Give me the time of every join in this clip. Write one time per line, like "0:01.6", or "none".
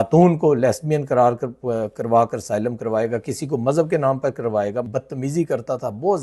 0:04.9